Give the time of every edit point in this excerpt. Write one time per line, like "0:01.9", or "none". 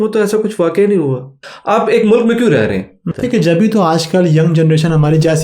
0:01.5
0:03.1